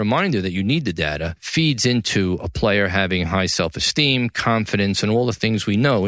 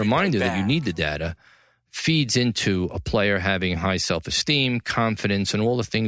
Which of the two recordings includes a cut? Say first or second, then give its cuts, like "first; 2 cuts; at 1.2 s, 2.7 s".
first; 1 cut; at 1.4 s